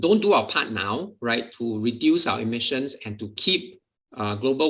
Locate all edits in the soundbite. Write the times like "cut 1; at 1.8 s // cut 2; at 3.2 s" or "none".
cut 1; at 1.5 s